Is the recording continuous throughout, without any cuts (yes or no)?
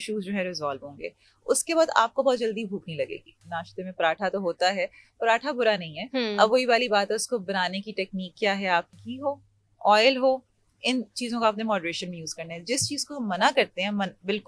no